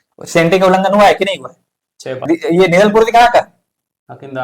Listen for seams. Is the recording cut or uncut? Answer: cut